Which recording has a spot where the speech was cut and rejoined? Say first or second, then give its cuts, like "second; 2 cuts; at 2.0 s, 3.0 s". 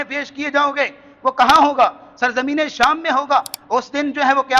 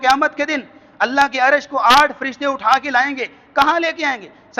first; 1 cut; at 3.6 s